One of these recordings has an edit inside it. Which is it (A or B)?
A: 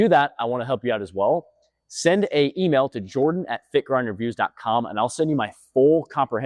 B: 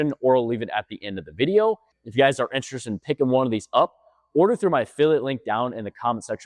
B